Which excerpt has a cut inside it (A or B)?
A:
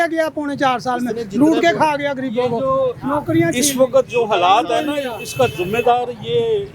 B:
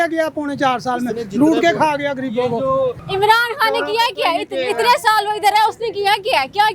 B